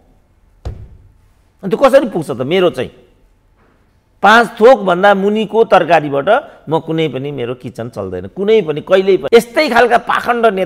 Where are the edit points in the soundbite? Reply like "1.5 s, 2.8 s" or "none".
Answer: 9.2 s